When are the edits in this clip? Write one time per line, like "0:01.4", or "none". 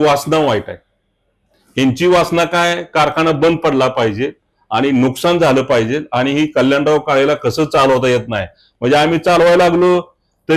none

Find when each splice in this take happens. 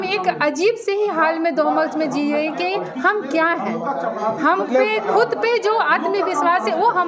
none

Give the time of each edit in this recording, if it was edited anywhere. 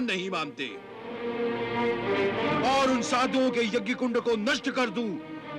0:01.1
0:02.4

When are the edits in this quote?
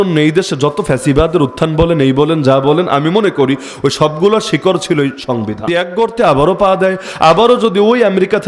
0:05.6

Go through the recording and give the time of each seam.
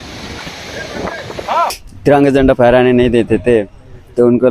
0:01.9

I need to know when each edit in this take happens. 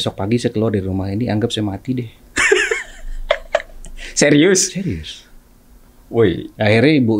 none

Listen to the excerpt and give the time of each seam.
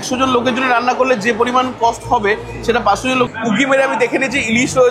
0:03.3

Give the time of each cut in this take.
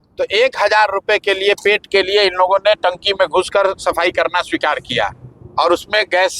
none

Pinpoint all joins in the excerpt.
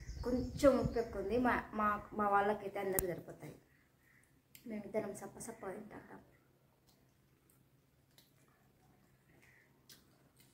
none

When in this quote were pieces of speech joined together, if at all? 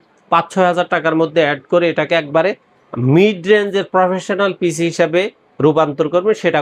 none

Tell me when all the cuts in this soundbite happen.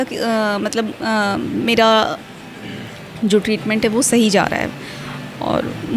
none

